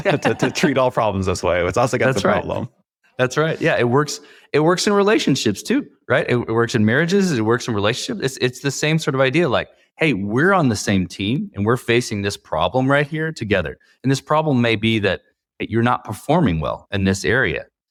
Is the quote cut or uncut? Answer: uncut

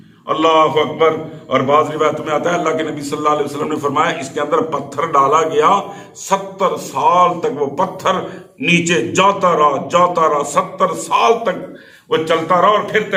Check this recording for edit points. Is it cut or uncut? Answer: uncut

